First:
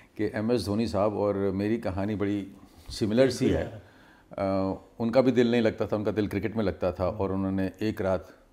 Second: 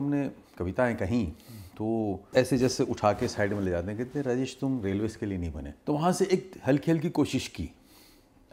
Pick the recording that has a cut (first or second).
second